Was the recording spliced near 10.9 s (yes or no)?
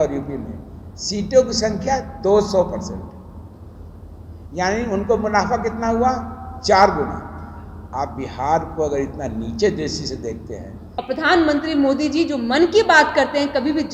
yes